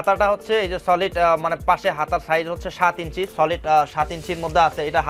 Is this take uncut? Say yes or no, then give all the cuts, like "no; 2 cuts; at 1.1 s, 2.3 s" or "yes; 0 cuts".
yes; 0 cuts